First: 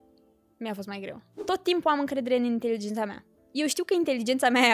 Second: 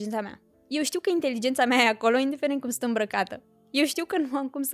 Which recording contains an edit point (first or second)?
first